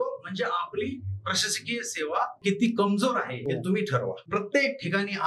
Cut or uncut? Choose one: cut